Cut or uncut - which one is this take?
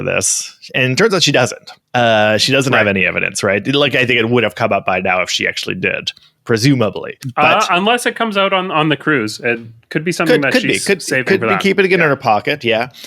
cut